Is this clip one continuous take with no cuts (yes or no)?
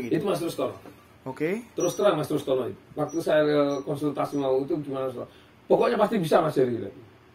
yes